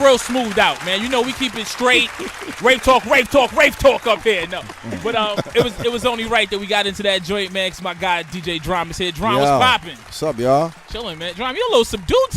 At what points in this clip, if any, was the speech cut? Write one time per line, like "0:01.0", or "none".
0:06.2